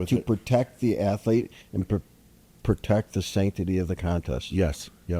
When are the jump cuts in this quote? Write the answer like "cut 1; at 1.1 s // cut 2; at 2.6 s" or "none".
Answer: none

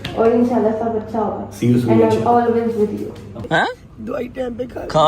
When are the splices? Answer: cut 1; at 3.3 s

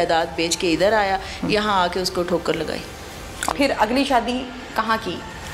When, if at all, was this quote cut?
cut 1; at 3.5 s

